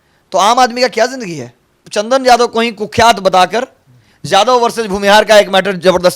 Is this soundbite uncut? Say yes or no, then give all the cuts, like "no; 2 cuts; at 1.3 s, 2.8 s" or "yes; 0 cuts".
no; 1 cut; at 1.8 s